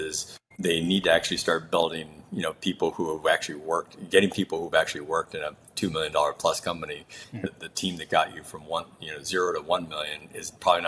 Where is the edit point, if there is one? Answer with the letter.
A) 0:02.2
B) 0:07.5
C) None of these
B